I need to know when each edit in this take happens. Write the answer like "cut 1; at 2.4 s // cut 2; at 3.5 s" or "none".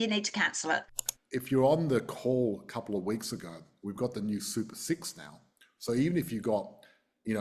cut 1; at 1.0 s

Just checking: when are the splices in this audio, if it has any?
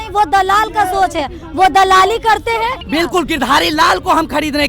cut 1; at 2.8 s

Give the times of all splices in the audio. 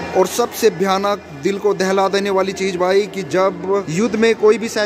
cut 1; at 3.9 s

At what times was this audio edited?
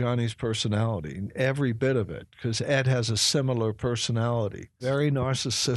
cut 1; at 4.8 s

